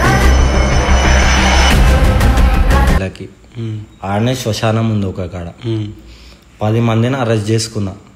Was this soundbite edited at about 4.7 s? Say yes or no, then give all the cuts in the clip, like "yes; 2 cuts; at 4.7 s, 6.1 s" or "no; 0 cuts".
no; 1 cut; at 3.0 s